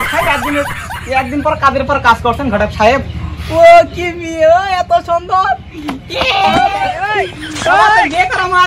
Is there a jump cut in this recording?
no; 0 cuts

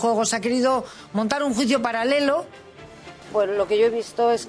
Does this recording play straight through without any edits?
no; 1 cut; at 3.0 s

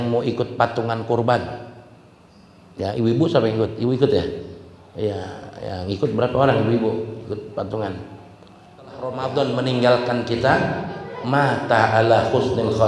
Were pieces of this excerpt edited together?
yes; 1 cut; at 9.2 s

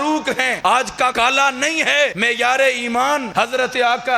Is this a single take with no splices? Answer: no; 3 cuts; at 0.9 s, 2.2 s, 3.3 s

